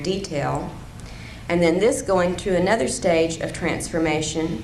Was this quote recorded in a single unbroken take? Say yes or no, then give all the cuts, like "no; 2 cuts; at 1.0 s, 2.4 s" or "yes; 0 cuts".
yes; 0 cuts